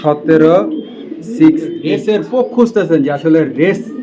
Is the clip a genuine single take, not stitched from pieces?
no; 1 cut; at 2.3 s

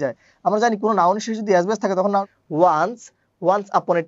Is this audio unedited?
no; 1 cut; at 2.2 s

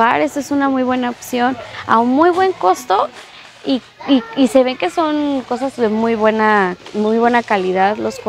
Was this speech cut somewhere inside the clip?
no; 0 cuts

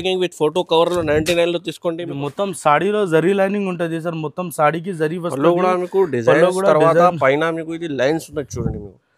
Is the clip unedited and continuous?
no; 1 cut; at 2.1 s

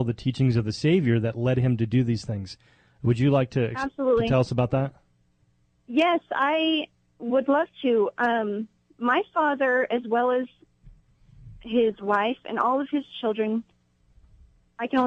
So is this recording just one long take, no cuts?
yes; 0 cuts

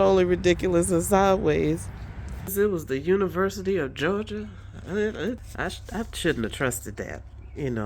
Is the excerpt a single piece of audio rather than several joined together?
no; 2 cuts; at 2.5 s, 5.4 s

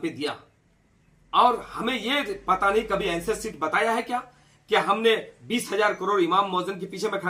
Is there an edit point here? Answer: no; 0 cuts

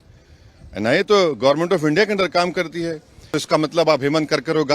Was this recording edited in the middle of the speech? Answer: yes; 1 cut; at 3.3 s

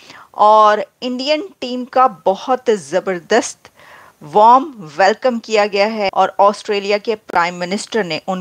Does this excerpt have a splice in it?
yes; 1 cut; at 6.1 s

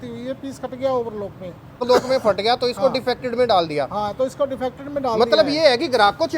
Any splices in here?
yes; 1 cut; at 1.8 s

